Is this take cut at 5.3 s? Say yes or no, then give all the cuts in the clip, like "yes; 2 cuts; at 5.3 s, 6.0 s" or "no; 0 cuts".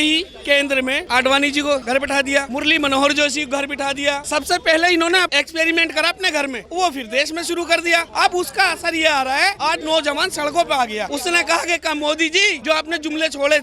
yes; 9 cuts; at 1.0 s, 2.0 s, 4.2 s, 5.3 s, 6.6 s, 8.1 s, 9.6 s, 11.1 s, 12.6 s